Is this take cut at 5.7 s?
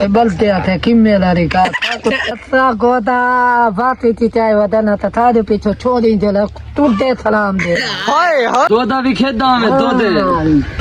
no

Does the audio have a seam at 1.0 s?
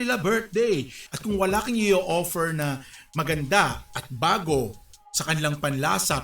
yes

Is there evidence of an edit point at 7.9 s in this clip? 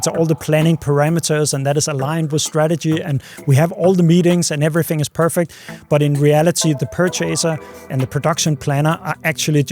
yes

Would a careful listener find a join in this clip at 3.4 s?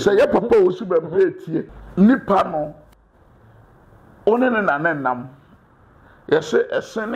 no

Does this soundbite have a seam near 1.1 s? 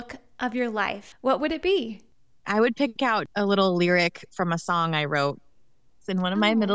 yes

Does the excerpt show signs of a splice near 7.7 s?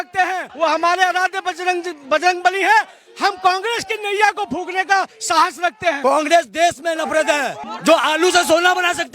yes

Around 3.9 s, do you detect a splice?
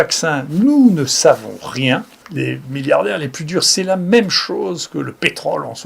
no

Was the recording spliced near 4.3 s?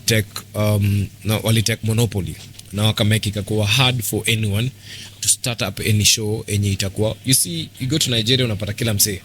no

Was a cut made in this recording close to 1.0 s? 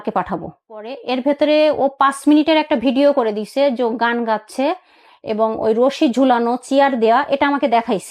yes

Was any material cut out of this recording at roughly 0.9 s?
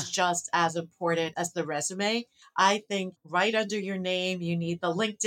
no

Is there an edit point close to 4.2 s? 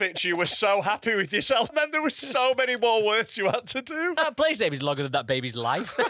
yes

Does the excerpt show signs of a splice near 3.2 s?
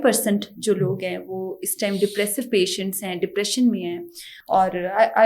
no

